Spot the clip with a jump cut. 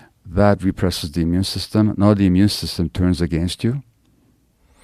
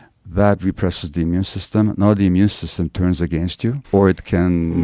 second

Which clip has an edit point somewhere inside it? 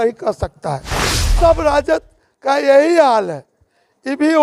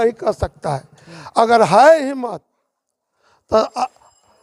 first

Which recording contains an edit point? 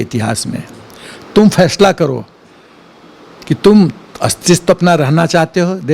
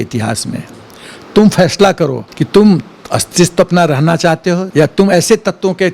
second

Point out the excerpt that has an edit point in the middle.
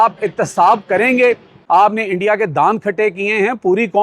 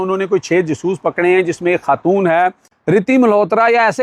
first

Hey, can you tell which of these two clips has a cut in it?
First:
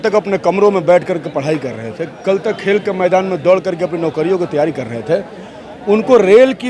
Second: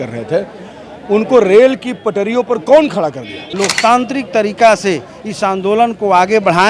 second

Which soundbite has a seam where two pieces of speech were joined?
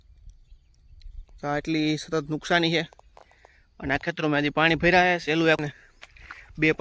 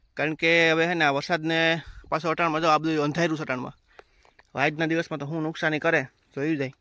first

